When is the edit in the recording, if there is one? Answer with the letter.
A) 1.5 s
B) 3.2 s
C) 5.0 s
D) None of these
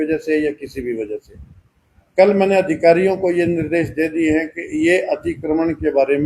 D